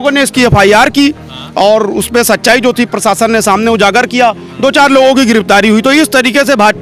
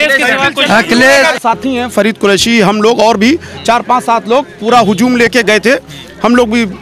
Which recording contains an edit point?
second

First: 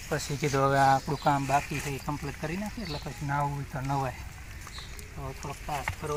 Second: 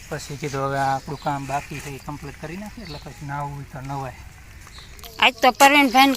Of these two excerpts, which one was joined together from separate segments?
second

